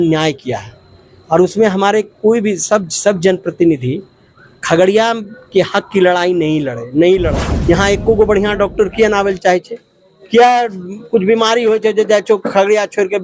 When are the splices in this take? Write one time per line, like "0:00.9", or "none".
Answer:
0:07.5